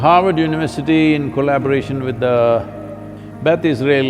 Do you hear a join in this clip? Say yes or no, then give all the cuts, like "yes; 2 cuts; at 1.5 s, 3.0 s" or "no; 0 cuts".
no; 0 cuts